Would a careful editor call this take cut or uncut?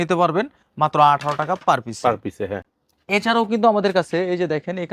uncut